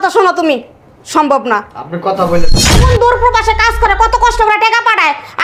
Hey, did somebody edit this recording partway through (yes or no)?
yes